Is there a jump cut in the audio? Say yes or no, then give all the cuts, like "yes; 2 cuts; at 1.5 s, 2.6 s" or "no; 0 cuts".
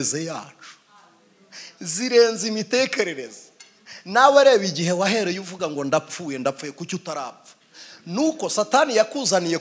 no; 0 cuts